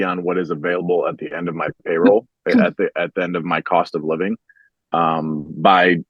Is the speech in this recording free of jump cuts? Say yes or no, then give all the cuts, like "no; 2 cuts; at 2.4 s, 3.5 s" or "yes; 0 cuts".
yes; 0 cuts